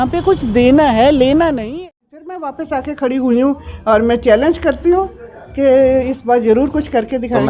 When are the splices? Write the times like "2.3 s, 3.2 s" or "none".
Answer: 1.7 s